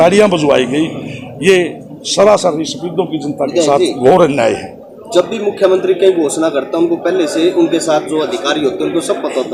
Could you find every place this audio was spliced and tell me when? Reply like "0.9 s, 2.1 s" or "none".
none